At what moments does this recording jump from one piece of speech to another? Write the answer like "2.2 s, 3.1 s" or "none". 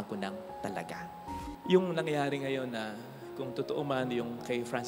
1.5 s